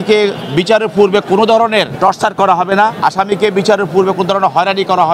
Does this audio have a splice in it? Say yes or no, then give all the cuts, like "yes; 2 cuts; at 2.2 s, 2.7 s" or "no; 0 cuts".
yes; 2 cuts; at 1.9 s, 2.9 s